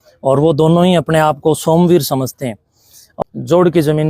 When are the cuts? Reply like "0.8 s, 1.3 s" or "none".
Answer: 3.1 s